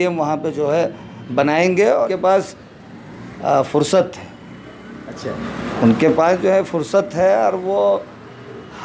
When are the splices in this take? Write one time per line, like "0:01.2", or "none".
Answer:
0:02.1